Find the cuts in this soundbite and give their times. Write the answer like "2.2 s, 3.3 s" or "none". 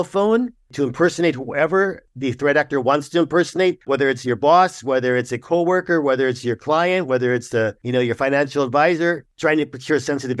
2.1 s, 3.8 s, 7.8 s, 9.3 s